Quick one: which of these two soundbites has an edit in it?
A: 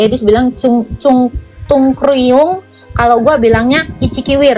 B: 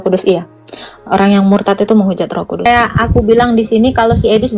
B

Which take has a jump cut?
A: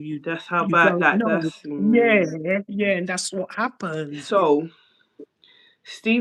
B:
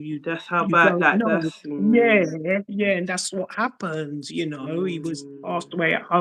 A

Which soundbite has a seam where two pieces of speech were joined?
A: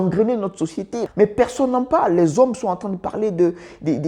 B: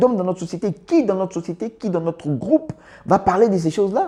A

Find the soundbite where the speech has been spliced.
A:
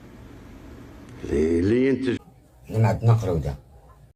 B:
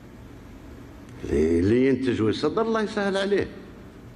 B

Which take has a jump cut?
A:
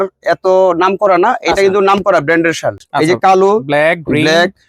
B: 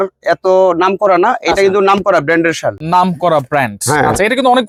A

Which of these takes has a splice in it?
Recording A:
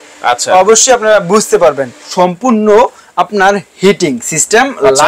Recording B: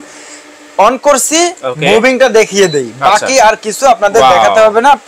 A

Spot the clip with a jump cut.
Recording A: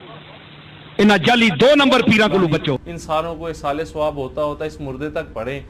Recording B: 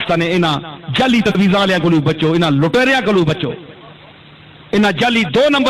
A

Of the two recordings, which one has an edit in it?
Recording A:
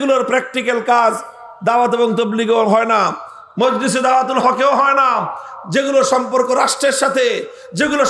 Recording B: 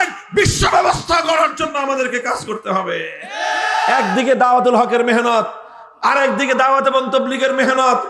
B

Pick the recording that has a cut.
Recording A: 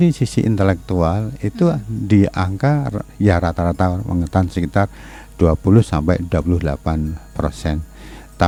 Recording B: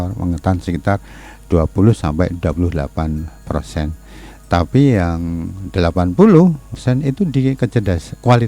B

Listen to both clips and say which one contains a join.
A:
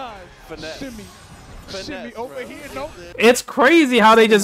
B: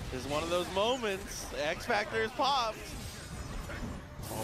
A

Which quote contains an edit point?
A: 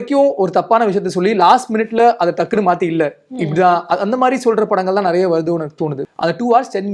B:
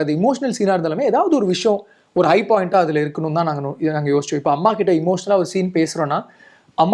A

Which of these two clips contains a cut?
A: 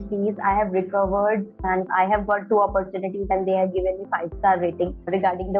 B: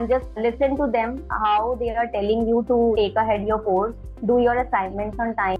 A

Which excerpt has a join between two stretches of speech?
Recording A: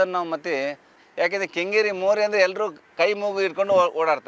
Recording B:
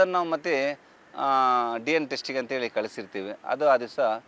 A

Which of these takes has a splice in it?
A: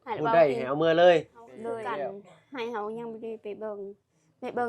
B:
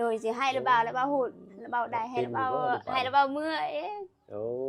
A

